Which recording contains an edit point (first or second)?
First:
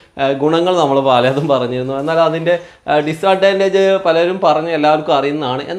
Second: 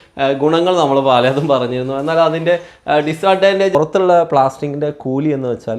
second